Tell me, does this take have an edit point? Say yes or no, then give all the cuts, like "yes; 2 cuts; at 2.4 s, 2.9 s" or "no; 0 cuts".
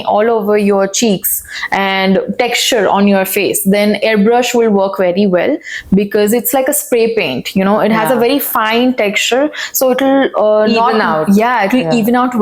no; 0 cuts